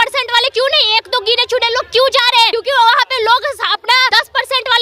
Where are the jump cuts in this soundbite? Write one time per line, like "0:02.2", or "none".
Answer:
0:02.5
0:04.1